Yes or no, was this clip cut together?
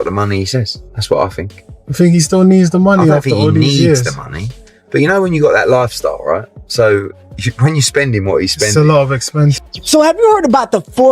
yes